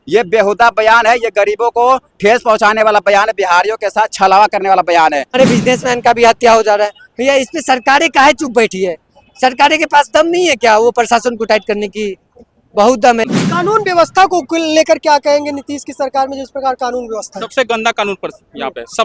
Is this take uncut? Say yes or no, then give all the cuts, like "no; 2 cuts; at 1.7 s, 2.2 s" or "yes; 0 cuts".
no; 2 cuts; at 5.3 s, 13.3 s